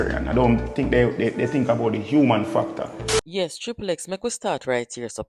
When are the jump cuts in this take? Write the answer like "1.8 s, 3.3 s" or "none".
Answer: none